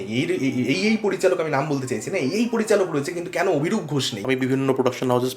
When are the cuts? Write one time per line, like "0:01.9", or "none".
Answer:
0:04.1